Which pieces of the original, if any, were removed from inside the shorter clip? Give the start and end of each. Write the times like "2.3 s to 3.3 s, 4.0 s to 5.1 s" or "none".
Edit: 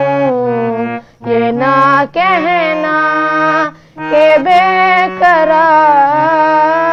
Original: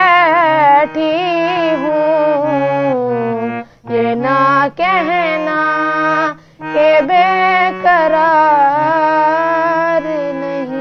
none

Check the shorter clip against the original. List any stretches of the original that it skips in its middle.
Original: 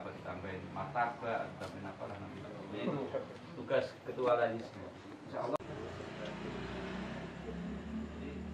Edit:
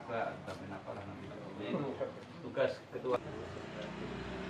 4.3 s to 5.6 s

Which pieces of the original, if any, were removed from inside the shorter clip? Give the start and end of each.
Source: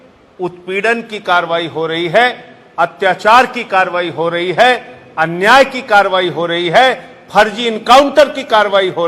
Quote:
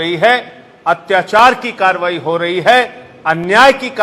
none

